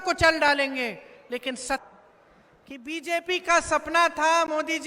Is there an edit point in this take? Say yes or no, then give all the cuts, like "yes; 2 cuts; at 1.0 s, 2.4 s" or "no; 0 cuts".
yes; 1 cut; at 1.8 s